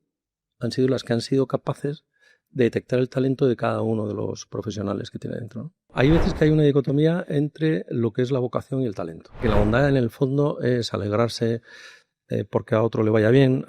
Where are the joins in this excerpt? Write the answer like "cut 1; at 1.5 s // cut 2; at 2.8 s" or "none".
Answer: cut 1; at 5.9 s // cut 2; at 9.4 s